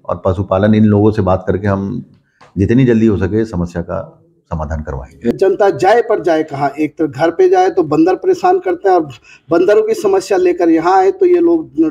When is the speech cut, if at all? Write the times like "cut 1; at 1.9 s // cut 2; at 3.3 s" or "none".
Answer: cut 1; at 5.3 s